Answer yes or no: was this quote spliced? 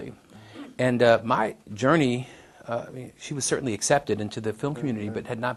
no